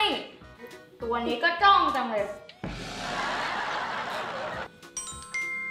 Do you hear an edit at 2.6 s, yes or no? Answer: no